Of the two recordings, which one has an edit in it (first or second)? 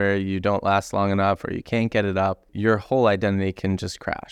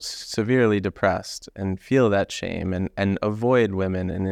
first